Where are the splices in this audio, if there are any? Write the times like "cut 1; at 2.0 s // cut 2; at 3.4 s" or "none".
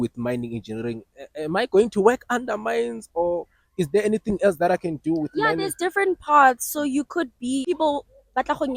cut 1; at 7.7 s